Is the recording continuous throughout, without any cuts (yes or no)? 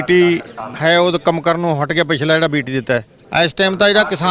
no